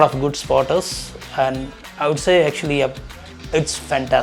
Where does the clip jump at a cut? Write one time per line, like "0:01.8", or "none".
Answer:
none

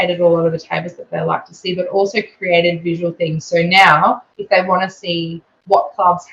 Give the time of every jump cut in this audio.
none

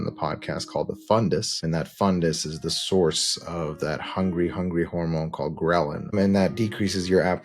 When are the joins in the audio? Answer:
0:01.6
0:06.1

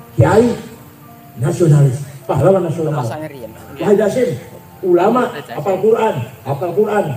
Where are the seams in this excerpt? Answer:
none

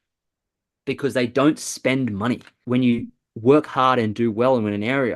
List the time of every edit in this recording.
0:02.5

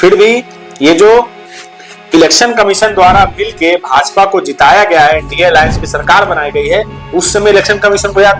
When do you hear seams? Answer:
none

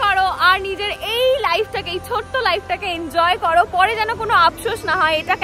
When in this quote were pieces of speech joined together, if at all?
none

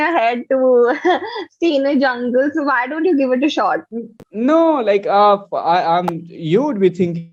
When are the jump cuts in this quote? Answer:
none

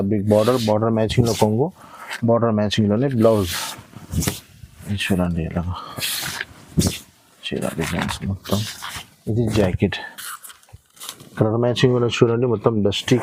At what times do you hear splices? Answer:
none

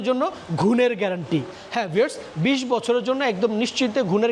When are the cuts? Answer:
none

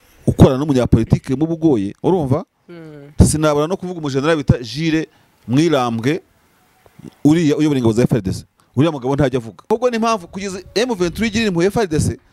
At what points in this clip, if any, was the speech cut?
0:09.7

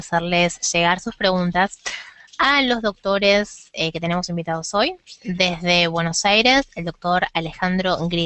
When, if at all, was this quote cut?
none

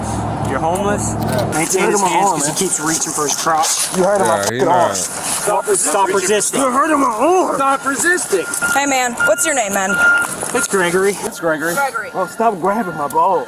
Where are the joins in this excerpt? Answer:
0:01.5

